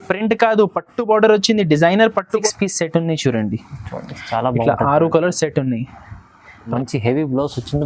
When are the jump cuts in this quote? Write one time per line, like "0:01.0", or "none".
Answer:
0:02.4
0:06.7